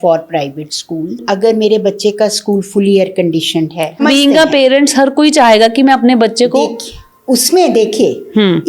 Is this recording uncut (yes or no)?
no